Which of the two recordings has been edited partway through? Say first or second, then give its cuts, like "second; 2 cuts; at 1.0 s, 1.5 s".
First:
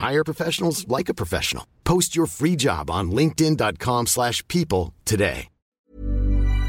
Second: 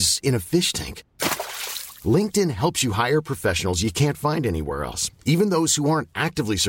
first; 1 cut; at 5.8 s